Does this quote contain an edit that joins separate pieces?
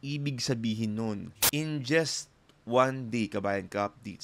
yes; 1 cut; at 1.3 s

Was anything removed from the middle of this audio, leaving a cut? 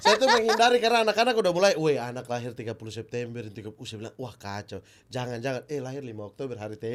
no; 0 cuts

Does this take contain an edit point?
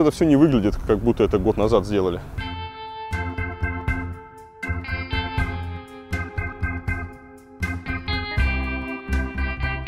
no; 0 cuts

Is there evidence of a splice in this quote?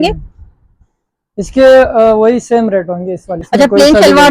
yes; 1 cut; at 3.4 s

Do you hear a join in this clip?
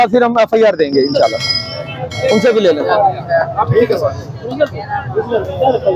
no; 0 cuts

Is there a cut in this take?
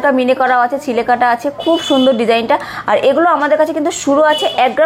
no; 0 cuts

